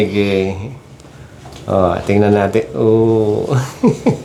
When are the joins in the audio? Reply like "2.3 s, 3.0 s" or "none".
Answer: none